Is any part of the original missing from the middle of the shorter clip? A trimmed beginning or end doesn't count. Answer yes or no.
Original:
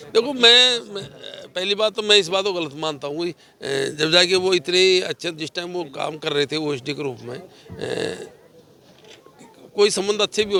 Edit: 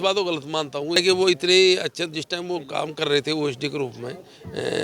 yes